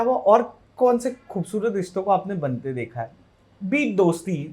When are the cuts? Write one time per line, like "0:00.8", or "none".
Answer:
none